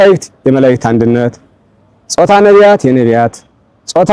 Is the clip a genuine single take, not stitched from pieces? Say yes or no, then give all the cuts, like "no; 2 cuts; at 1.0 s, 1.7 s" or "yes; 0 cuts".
yes; 0 cuts